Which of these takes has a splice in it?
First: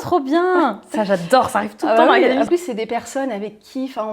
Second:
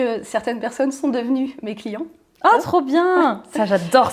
first; 1 cut; at 2.5 s

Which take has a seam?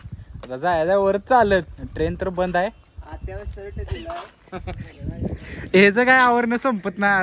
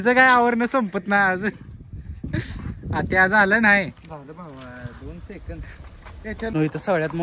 second; 1 cut; at 6.0 s

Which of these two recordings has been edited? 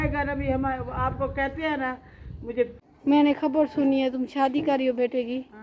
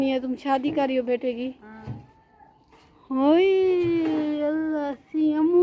first; 1 cut; at 2.8 s

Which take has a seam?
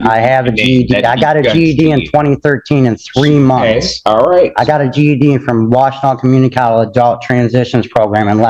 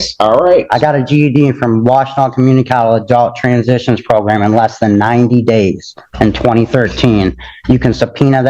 first; 1 cut; at 2.2 s

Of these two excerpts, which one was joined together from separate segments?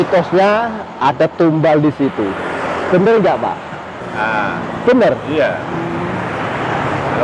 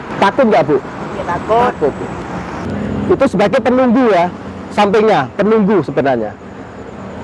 second; 1 cut; at 2.6 s

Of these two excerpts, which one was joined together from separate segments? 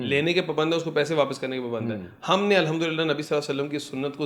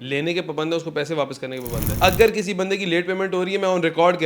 second; 1 cut; at 1.9 s

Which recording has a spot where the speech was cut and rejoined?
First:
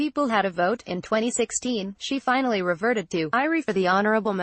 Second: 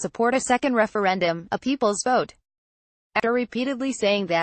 second; 1 cut; at 3.2 s

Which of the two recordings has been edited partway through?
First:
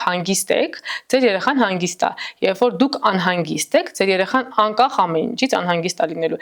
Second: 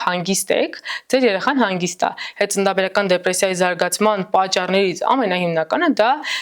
second; 1 cut; at 2.2 s

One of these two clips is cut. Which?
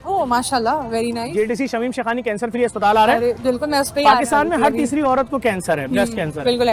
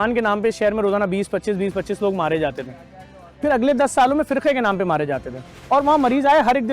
second; 1 cut; at 5.7 s

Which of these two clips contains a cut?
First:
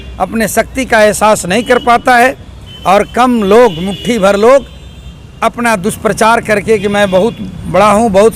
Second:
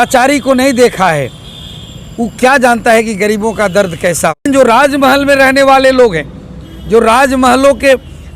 second; 1 cut; at 4.4 s

